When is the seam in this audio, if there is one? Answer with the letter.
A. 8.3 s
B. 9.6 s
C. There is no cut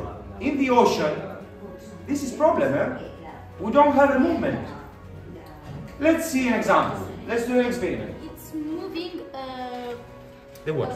A